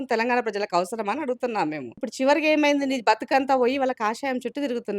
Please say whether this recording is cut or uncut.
cut